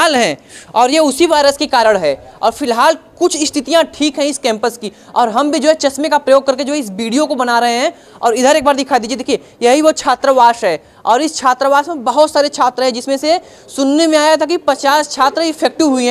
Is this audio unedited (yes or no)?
yes